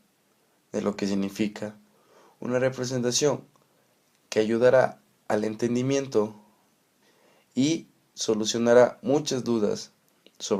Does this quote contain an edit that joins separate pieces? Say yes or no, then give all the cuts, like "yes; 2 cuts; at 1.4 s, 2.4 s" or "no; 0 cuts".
yes; 1 cut; at 2.2 s